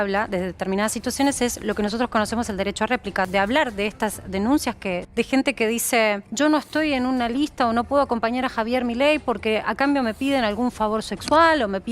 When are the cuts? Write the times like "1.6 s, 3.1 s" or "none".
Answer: 3.2 s, 5.0 s, 6.3 s